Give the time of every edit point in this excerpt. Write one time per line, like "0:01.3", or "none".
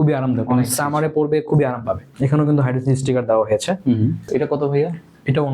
0:02.1
0:04.2

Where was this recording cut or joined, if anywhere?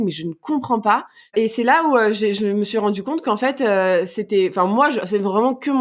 0:01.3

